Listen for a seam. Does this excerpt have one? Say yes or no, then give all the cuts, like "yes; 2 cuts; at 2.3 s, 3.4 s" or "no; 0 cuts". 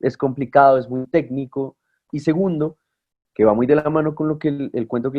yes; 1 cut; at 2.1 s